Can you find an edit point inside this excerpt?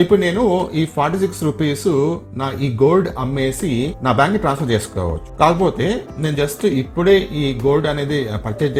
no; 0 cuts

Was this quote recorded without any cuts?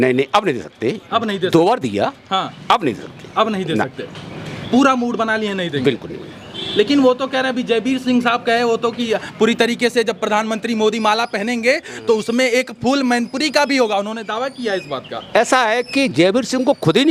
yes; 0 cuts

